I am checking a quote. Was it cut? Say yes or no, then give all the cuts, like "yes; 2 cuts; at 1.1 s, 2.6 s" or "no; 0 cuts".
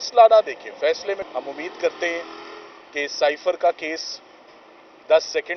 yes; 1 cut; at 1.2 s